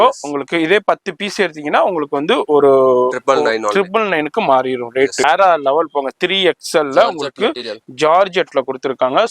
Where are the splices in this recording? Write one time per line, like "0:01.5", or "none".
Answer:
0:05.2